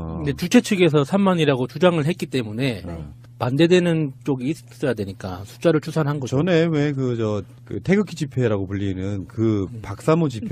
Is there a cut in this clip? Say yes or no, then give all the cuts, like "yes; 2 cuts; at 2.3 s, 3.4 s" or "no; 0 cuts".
no; 0 cuts